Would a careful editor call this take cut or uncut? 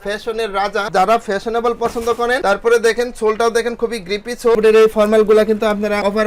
cut